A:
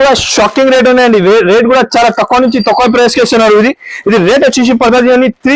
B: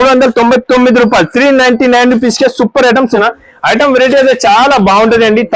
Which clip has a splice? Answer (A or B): B